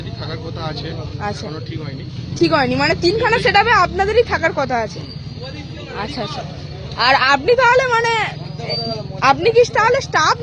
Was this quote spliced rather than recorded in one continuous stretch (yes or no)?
no